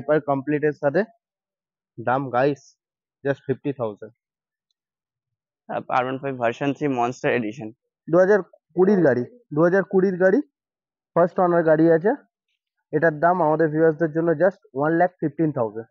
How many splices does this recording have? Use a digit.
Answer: 0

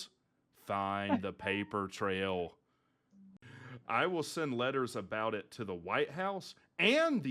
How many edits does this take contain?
1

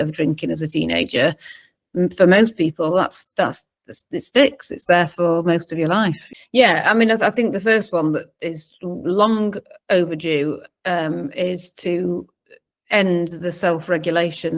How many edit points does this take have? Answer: 1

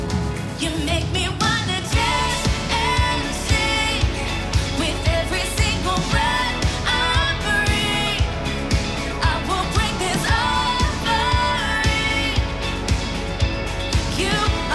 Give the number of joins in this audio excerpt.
0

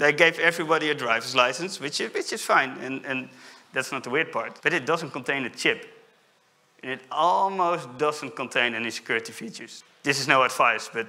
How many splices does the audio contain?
2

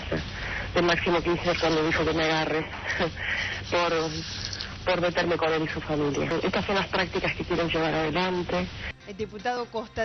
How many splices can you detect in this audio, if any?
2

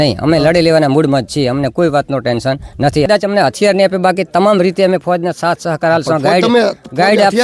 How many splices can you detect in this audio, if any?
1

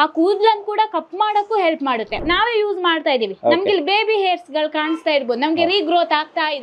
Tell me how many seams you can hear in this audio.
1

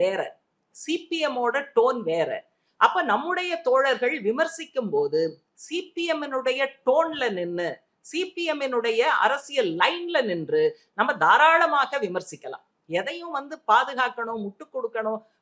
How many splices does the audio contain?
0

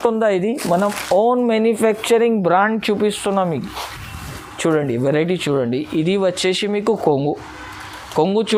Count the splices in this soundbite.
0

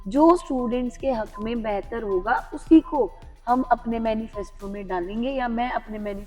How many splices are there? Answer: 0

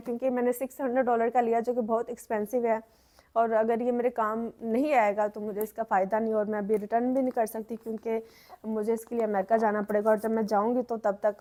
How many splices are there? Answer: 0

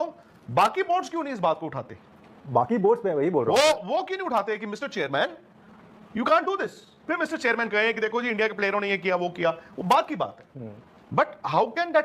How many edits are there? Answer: 0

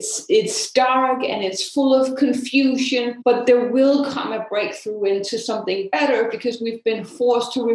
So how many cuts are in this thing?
1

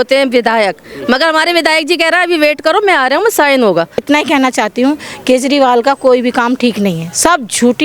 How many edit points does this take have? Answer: 1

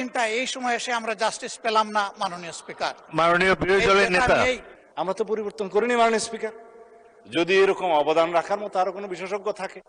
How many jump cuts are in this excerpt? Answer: 1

